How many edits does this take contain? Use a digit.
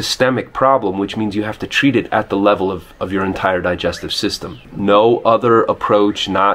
1